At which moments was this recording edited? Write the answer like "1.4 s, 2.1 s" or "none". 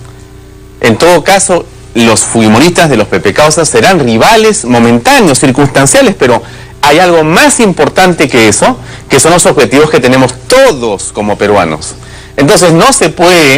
none